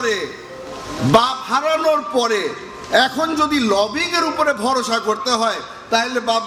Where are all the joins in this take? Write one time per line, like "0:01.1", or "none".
none